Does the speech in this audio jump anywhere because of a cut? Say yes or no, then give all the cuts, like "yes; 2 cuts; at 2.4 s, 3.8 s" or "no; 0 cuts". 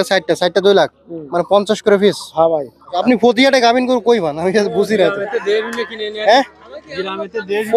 yes; 1 cut; at 3.0 s